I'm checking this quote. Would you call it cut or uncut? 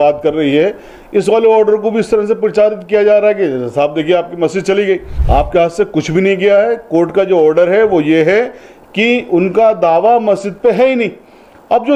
cut